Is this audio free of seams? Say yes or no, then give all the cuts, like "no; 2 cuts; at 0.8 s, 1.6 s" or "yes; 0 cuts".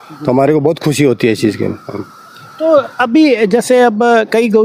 yes; 0 cuts